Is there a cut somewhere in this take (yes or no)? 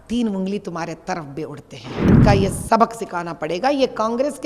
yes